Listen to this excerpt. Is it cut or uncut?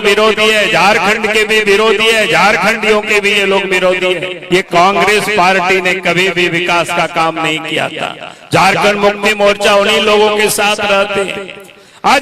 cut